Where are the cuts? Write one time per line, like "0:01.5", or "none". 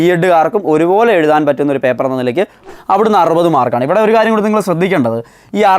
0:02.6